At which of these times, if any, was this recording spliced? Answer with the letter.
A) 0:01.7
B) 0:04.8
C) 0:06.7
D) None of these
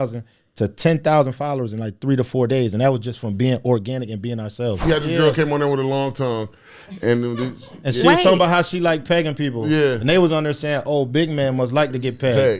B